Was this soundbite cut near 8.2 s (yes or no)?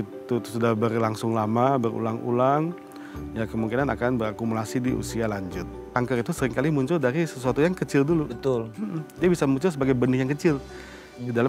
no